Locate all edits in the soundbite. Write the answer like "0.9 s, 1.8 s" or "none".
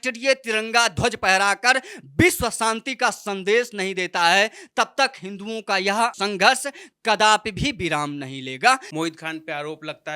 6.1 s, 8.9 s